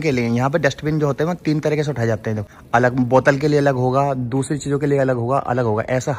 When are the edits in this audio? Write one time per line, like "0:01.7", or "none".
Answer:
0:02.5